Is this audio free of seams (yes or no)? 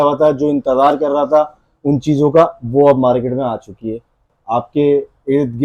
no